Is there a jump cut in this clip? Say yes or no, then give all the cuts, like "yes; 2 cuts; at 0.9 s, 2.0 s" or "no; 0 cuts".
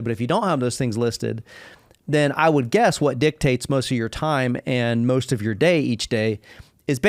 no; 0 cuts